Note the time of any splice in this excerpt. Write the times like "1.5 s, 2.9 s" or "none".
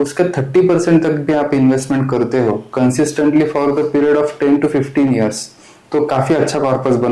none